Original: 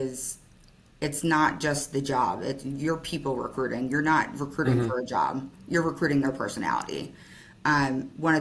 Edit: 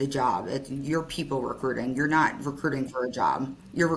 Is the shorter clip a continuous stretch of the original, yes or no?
yes